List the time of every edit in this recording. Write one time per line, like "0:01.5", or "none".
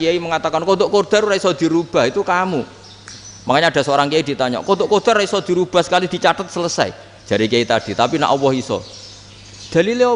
none